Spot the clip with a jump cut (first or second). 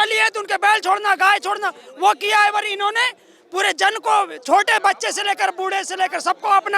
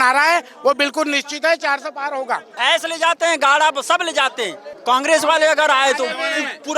second